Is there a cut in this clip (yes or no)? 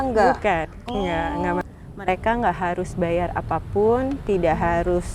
yes